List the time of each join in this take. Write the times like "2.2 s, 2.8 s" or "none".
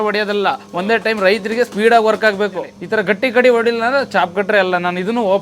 2.8 s